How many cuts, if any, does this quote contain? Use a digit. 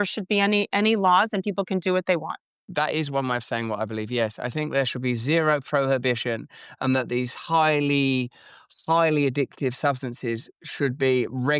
1